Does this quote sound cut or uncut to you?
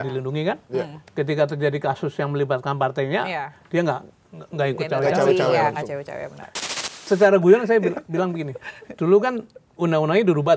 cut